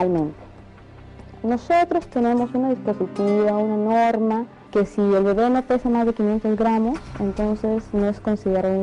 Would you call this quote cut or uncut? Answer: uncut